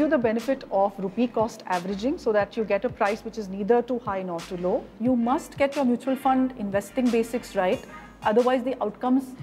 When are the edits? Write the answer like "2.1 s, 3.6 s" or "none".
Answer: 4.9 s